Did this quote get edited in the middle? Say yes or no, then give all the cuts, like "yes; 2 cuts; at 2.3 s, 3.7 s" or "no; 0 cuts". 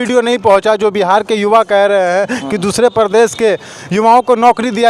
no; 0 cuts